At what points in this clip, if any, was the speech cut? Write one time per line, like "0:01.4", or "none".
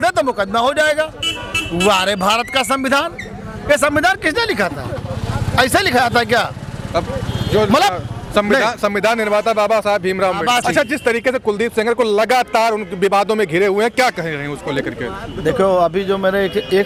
none